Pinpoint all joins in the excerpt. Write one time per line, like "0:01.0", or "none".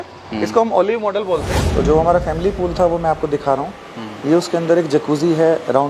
0:01.6